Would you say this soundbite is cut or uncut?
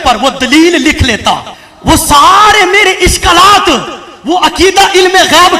cut